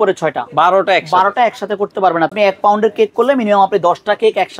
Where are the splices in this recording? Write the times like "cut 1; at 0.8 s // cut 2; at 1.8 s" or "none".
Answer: cut 1; at 2.3 s